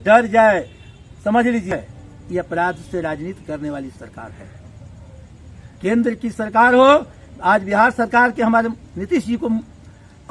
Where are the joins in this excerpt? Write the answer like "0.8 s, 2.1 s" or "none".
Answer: 1.7 s